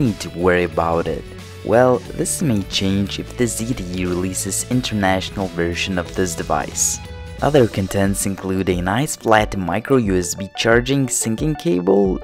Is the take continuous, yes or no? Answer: no